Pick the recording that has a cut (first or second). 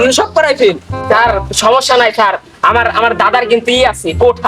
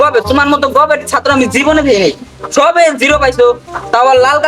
first